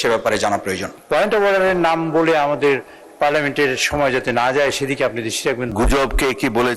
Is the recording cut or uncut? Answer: cut